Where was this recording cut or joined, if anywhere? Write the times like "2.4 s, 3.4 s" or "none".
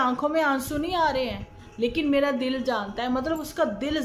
none